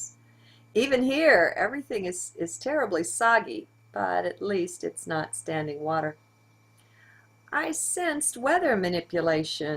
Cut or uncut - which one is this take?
cut